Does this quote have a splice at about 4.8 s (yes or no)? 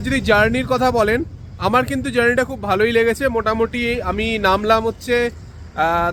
no